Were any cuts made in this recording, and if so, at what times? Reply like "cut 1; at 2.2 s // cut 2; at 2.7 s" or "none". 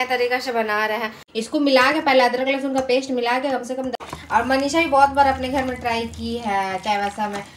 cut 1; at 1.2 s // cut 2; at 4.0 s